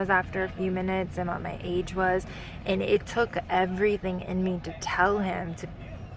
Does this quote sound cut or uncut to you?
uncut